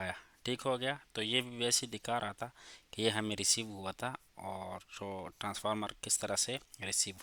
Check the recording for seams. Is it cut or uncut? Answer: uncut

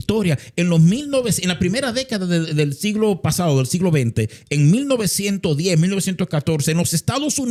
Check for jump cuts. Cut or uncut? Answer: uncut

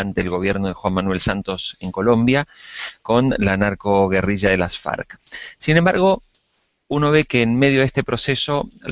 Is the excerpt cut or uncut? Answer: uncut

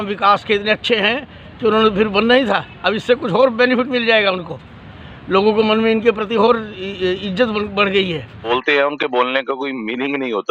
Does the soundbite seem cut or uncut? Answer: cut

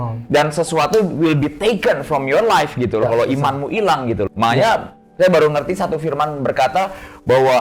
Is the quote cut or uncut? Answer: uncut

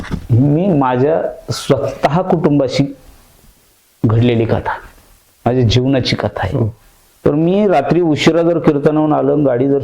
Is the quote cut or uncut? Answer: cut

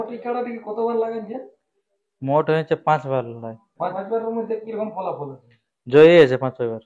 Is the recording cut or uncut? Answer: cut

